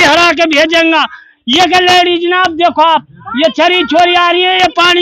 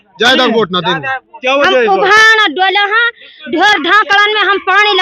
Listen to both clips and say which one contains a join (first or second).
second